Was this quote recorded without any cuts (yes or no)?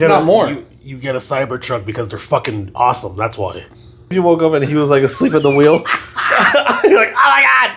no